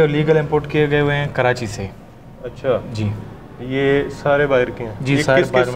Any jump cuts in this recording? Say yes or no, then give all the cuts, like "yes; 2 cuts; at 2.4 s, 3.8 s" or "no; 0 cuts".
no; 0 cuts